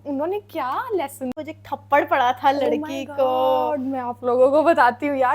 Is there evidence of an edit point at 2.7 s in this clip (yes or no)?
no